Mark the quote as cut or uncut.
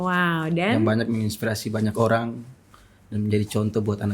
uncut